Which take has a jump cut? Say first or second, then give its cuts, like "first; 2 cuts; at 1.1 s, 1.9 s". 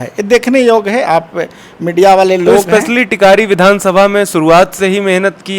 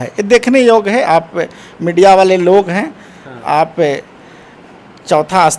first; 1 cut; at 2.6 s